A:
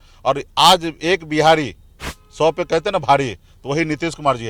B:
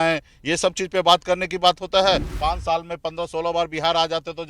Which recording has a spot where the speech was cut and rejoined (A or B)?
B